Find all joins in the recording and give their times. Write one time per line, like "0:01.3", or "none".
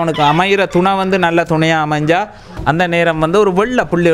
0:02.5